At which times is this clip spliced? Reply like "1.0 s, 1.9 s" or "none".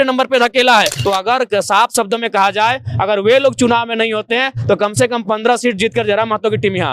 0.9 s

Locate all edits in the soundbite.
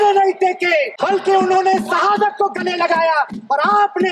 0.9 s

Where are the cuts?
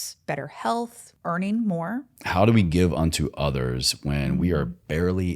1.1 s, 2.2 s

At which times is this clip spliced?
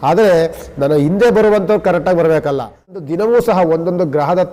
3.0 s

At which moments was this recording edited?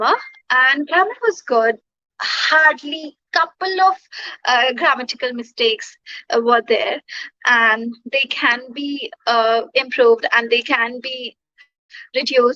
none

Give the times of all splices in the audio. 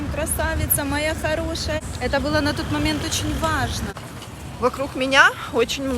1.8 s, 3.9 s

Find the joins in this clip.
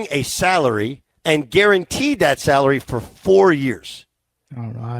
1.1 s

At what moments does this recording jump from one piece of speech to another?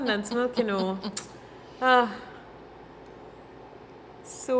none

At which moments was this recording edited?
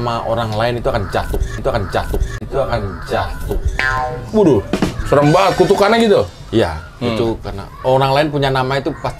none

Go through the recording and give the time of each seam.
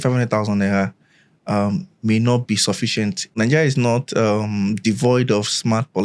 3.3 s

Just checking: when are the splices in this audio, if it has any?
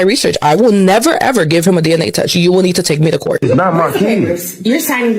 3.5 s

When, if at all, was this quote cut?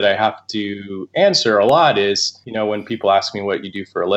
2.4 s

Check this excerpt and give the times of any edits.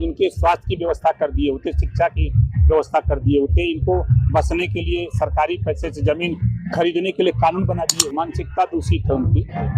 7.9 s

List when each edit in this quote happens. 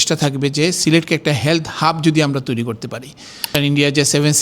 3.5 s

